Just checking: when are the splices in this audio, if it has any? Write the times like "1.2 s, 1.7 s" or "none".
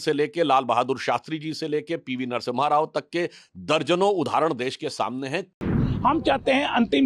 5.8 s